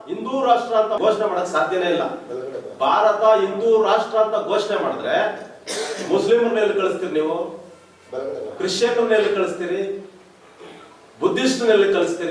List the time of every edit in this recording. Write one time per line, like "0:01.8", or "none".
0:01.0